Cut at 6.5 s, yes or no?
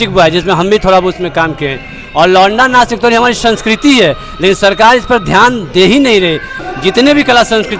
yes